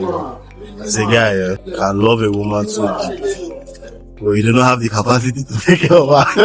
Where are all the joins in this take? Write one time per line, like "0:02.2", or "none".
0:01.7